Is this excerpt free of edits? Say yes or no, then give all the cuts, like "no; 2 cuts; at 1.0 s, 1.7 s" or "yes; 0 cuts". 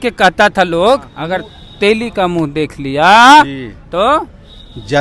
no; 1 cut; at 1.1 s